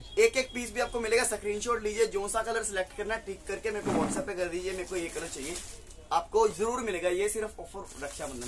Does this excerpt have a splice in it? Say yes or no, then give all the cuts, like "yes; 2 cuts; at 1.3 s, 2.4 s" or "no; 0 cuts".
no; 0 cuts